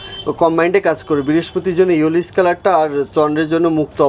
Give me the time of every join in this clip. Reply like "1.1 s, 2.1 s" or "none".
none